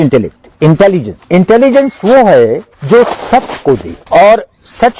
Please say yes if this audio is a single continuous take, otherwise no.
no